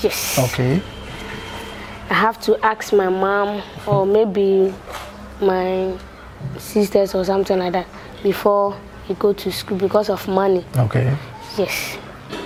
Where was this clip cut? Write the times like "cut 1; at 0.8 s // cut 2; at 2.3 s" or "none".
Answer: none